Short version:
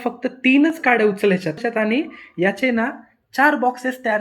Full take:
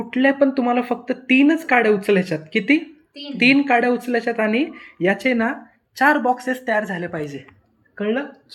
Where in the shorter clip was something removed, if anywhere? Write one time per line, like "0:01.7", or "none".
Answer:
0:01.6